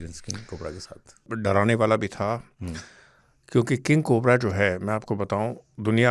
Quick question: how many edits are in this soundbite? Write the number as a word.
one